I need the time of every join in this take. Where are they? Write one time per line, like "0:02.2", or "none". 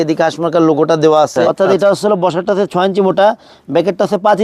0:01.5